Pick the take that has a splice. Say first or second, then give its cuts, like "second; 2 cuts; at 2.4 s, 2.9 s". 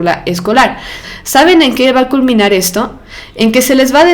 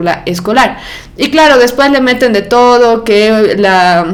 first; 1 cut; at 1.0 s